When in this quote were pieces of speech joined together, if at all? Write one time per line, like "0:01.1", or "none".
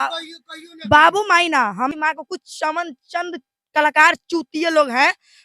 0:01.9